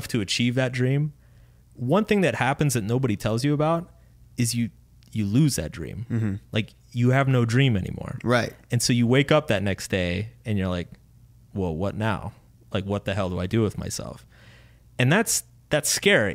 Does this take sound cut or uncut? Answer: uncut